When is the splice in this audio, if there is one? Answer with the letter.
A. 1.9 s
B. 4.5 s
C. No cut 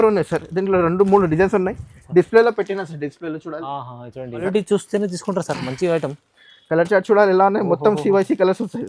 B